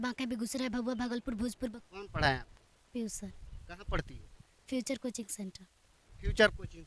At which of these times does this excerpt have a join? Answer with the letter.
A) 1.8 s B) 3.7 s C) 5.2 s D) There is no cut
A